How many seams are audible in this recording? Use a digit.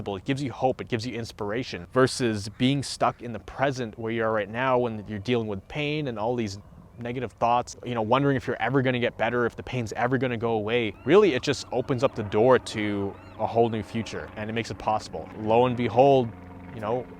5